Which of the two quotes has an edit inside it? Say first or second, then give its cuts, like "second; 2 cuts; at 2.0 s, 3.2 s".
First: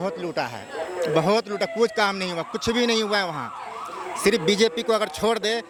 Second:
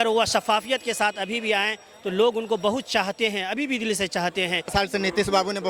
second; 1 cut; at 4.7 s